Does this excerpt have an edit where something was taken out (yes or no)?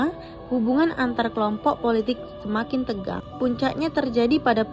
yes